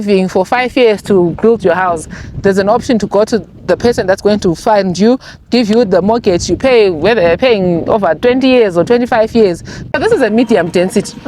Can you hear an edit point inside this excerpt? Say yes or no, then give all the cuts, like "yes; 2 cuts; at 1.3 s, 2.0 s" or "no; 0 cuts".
yes; 1 cut; at 9.9 s